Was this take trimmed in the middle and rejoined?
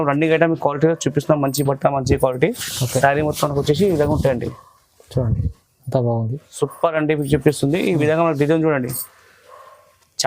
no; 0 cuts

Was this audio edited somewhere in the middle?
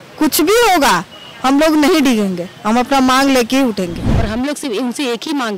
yes; 1 cut; at 4.1 s

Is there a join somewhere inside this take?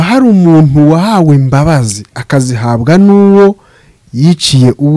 no; 0 cuts

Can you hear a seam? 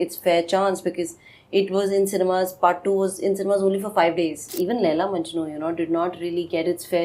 yes; 1 cut; at 4.4 s

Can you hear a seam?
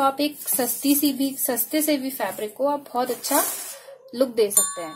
no; 0 cuts

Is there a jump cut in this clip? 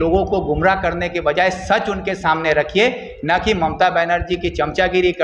no; 0 cuts

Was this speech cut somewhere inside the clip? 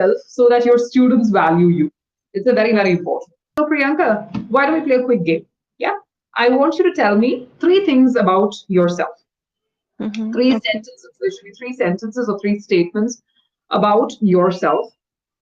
yes; 1 cut; at 3.4 s

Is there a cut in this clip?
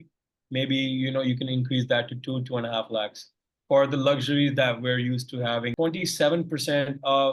yes; 1 cut; at 5.7 s

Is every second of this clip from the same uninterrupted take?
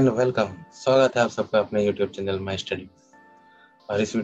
yes; 0 cuts

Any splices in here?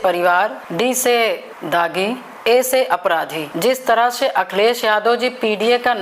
yes; 1 cut; at 3.4 s

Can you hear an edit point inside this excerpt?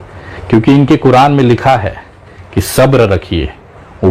no; 0 cuts

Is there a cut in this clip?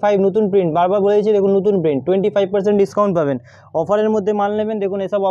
no; 0 cuts

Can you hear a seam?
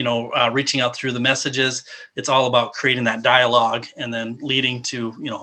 no; 0 cuts

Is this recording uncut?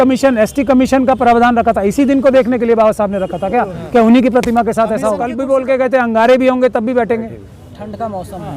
no; 1 cut; at 5.3 s

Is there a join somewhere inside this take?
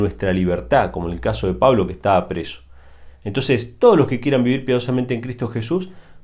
no; 0 cuts

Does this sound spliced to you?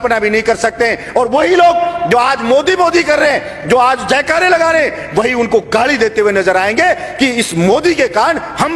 no; 0 cuts

